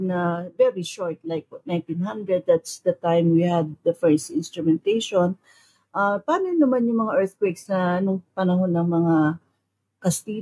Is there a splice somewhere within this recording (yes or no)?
no